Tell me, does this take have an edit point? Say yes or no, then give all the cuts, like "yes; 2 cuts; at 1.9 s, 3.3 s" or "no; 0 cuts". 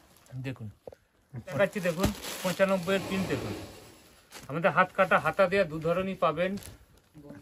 yes; 1 cut; at 1.5 s